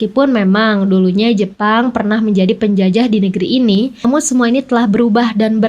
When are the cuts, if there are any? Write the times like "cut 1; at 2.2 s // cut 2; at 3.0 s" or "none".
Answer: none

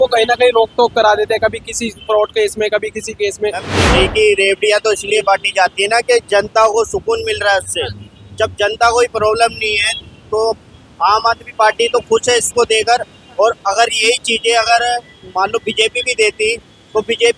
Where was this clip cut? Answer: cut 1; at 3.7 s

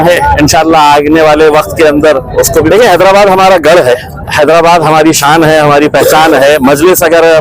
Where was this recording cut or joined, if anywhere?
cut 1; at 2.7 s

